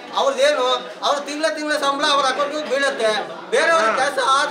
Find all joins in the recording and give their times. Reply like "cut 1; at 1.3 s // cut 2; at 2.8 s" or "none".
none